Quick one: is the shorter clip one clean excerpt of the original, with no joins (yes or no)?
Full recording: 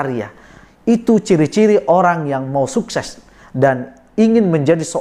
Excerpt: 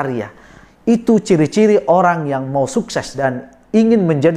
no